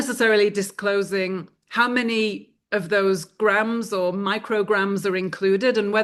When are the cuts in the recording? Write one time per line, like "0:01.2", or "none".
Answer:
none